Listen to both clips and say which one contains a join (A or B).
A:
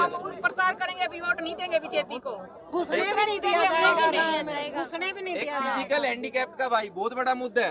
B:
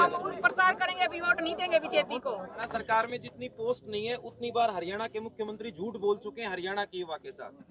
B